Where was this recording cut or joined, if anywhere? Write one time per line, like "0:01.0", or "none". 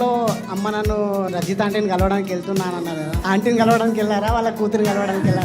0:01.3
0:03.2